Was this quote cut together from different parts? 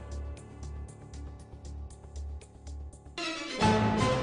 yes; 1 cut; at 3.1 s

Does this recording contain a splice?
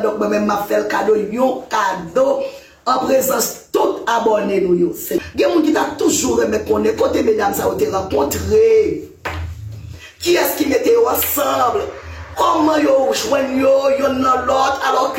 yes; 1 cut; at 5.2 s

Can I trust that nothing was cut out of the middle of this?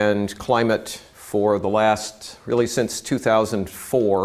yes; 0 cuts

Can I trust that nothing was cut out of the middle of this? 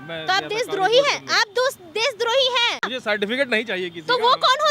no; 1 cut; at 2.9 s

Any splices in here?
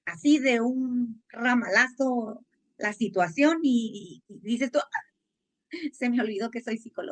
no; 0 cuts

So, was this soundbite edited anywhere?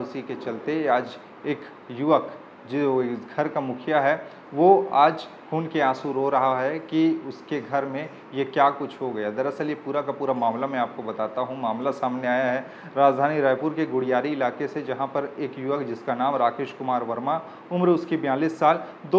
no; 0 cuts

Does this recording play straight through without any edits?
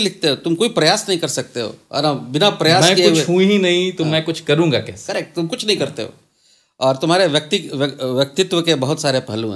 yes; 0 cuts

